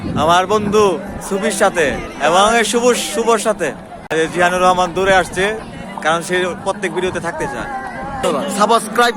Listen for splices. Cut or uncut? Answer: cut